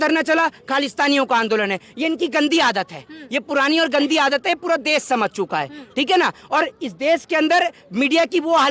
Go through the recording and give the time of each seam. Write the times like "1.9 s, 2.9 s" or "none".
none